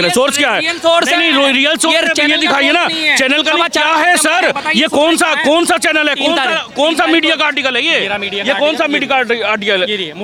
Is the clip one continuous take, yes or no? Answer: yes